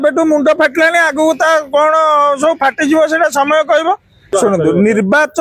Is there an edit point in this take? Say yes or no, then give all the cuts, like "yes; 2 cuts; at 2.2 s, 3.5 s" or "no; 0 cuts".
yes; 1 cut; at 4.2 s